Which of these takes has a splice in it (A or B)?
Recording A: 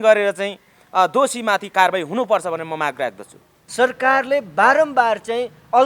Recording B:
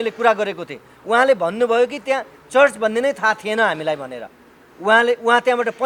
A